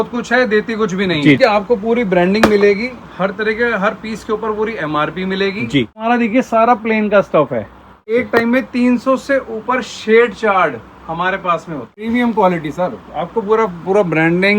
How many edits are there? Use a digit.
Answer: 4